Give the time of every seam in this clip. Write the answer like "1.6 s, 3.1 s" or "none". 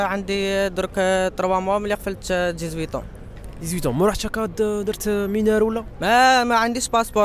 none